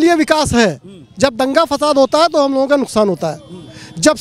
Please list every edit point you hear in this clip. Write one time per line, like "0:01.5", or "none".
none